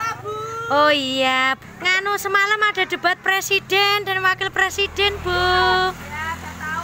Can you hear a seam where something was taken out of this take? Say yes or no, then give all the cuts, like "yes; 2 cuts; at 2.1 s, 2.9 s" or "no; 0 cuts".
yes; 1 cut; at 1.6 s